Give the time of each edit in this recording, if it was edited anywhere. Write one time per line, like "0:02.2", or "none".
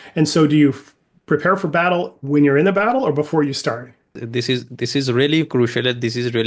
0:04.2